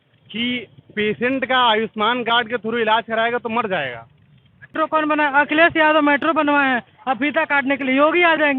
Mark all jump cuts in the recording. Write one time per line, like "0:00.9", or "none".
0:04.7